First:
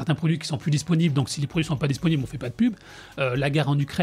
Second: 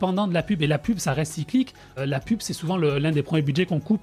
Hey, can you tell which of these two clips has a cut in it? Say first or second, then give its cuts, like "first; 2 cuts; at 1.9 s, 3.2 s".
second; 1 cut; at 2.0 s